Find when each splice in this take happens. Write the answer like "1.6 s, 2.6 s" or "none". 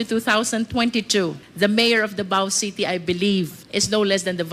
1.4 s, 3.6 s